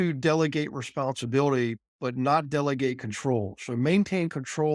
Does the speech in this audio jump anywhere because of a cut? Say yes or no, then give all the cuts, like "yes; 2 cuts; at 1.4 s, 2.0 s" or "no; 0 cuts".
no; 0 cuts